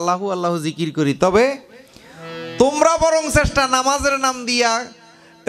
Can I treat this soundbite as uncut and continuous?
yes; 0 cuts

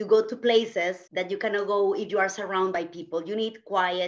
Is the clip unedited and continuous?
no; 1 cut; at 1.0 s

